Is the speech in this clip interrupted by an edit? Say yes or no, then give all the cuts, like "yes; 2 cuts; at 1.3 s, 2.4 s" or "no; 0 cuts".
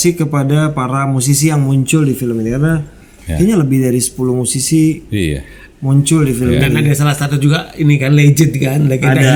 no; 0 cuts